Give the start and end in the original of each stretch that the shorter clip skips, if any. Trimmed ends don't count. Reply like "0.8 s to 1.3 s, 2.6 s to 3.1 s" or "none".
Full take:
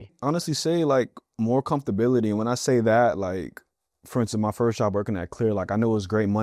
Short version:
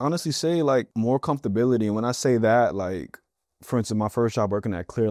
1.1 s to 1.3 s

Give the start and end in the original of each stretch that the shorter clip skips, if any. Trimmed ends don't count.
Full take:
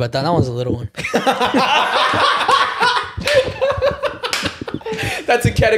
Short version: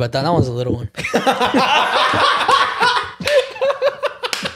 none

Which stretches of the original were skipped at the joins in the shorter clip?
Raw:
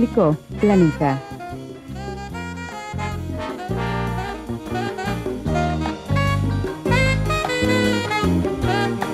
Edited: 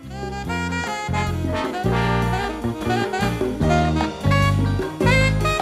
none

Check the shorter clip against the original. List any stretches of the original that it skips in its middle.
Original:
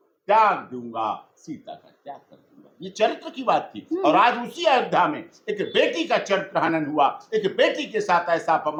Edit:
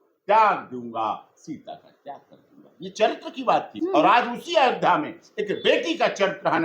3.7 s to 3.8 s

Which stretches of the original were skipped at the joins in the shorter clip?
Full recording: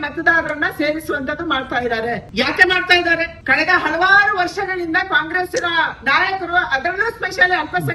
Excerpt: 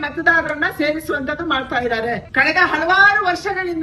2.2 s to 3.4 s

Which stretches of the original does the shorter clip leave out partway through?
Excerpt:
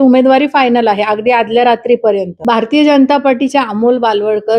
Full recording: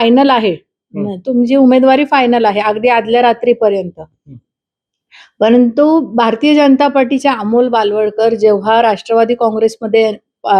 4.0 s to 6.1 s

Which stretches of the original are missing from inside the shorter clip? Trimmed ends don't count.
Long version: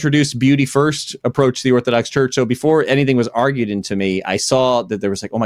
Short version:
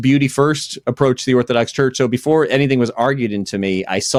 none

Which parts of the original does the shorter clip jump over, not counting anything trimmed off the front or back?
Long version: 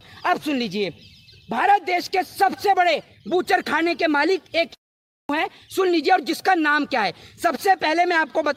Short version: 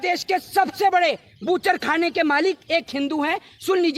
4.8 s to 5.1 s

